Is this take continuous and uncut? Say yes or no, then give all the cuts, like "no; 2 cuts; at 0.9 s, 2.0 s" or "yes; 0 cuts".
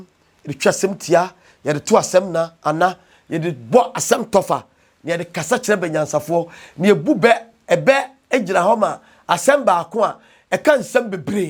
yes; 0 cuts